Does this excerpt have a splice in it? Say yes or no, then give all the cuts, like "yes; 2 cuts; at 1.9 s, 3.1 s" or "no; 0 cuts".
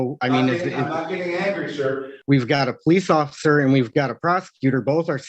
yes; 1 cut; at 2.1 s